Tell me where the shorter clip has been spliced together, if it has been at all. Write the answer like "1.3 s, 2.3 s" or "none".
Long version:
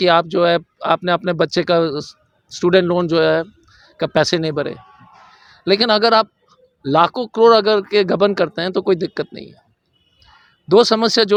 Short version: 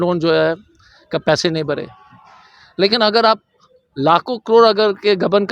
none